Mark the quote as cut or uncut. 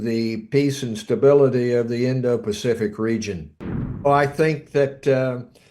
cut